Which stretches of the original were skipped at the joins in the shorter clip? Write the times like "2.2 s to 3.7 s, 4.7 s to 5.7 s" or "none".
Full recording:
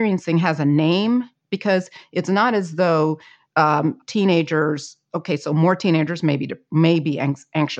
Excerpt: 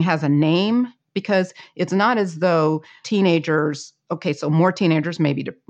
3.4 s to 4.0 s